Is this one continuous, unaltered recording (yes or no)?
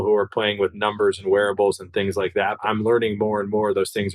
no